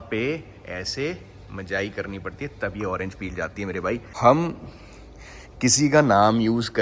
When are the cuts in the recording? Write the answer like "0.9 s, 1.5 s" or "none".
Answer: 4.1 s